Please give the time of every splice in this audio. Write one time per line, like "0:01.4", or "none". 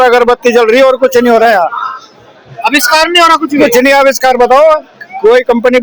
none